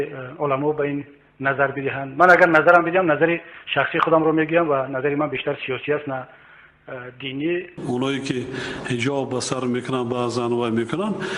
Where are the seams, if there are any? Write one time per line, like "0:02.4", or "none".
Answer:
0:07.8